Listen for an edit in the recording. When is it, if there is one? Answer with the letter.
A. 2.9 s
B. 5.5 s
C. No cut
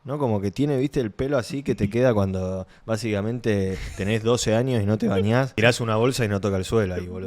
B